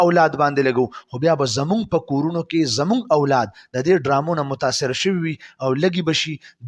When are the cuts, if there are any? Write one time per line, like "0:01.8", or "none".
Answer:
none